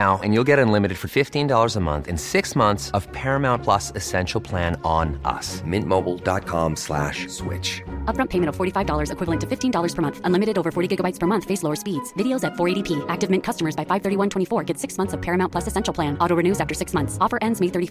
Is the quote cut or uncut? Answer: uncut